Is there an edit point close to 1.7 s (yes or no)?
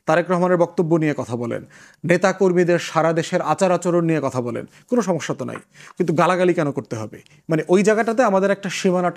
no